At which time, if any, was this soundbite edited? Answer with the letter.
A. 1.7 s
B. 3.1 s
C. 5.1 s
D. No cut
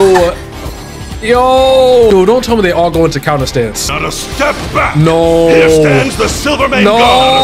D